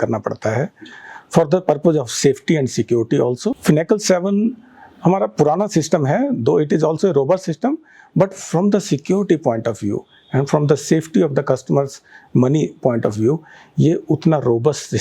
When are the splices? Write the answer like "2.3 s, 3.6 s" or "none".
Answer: 3.6 s